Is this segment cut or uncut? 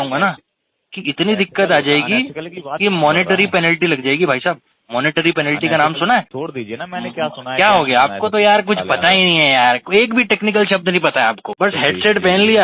cut